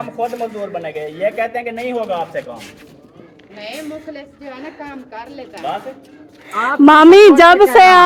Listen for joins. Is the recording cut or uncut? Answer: uncut